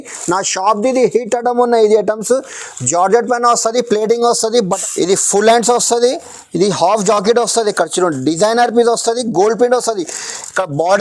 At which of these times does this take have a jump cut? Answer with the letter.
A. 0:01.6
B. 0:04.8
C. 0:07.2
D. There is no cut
B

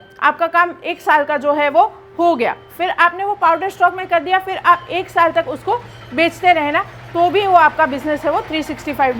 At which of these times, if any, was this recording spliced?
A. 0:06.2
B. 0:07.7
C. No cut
C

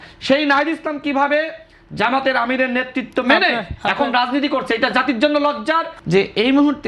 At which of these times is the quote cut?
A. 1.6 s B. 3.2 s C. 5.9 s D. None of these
C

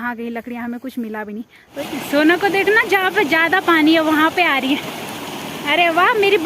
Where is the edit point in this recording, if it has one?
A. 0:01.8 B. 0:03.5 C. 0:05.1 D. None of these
A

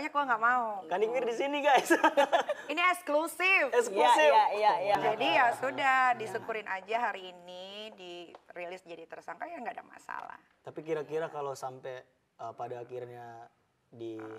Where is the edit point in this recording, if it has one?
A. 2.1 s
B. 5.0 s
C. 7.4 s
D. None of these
B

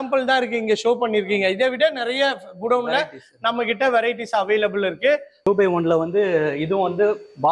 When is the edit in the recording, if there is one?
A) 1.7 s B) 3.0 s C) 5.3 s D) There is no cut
C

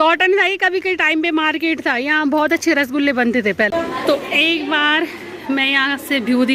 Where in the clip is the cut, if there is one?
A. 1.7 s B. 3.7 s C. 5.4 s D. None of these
B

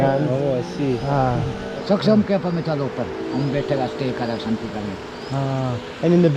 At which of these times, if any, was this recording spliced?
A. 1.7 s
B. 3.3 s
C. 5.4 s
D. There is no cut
A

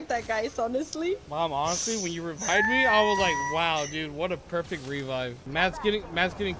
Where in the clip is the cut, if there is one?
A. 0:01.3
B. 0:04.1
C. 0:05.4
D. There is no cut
C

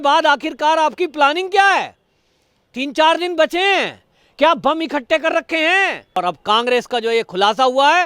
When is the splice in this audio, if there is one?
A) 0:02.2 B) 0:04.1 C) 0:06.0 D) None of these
C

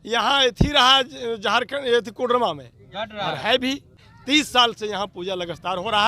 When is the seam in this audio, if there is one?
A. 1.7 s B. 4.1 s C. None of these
B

